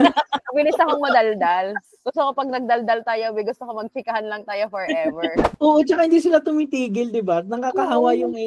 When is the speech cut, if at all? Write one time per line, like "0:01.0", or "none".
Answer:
0:05.4